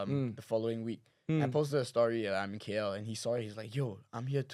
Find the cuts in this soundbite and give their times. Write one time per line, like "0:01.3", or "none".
none

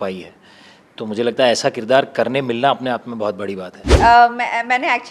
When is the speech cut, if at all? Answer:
0:03.8

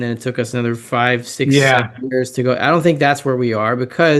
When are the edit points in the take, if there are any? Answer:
none

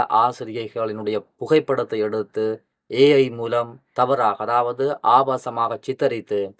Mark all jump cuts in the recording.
none

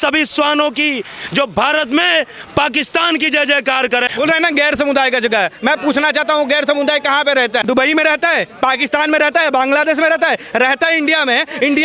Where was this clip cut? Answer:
0:04.1
0:07.6

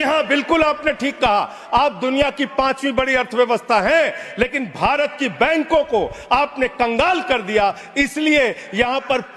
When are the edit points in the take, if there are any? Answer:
none

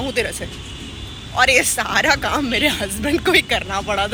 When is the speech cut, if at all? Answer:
none

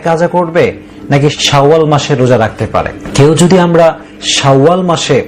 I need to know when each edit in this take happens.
0:01.4
0:03.0

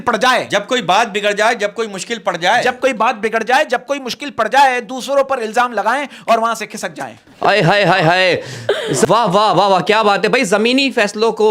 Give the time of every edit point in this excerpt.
none

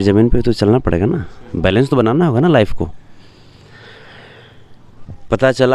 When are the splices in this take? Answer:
none

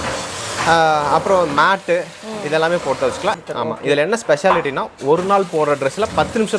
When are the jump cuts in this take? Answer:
0:03.4

